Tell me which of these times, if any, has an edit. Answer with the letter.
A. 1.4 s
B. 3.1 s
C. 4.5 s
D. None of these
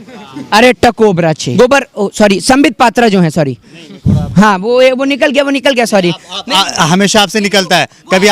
A